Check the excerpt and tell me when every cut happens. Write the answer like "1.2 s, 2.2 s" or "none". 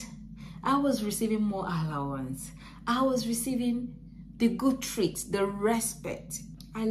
none

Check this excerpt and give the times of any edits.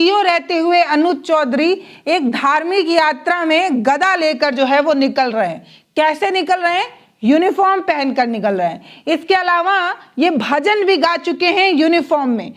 none

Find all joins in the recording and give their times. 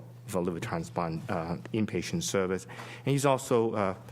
1.8 s

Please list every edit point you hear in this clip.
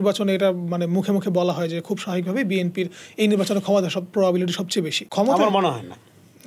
5.0 s

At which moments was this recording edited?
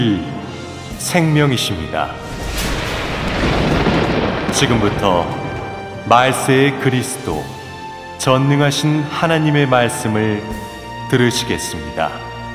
none

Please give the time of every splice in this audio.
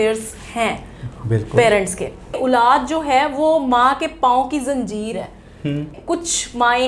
2.3 s, 6.0 s

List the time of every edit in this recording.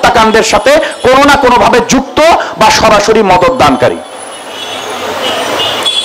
none

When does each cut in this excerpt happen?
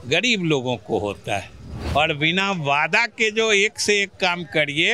1.8 s

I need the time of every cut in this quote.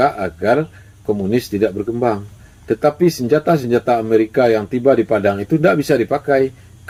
none

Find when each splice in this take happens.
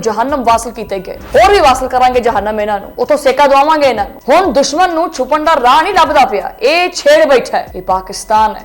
4.1 s, 7.7 s

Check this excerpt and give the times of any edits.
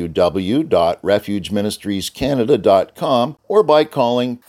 3.4 s

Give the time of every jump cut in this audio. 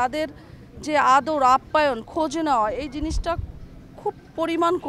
none

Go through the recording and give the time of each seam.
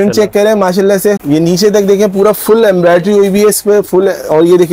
none

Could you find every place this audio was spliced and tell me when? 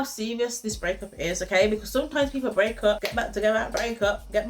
3.0 s

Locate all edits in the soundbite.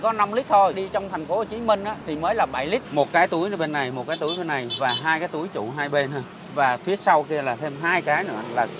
0.8 s, 2.0 s, 2.9 s

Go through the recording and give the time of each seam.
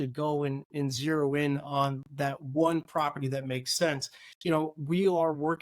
4.3 s

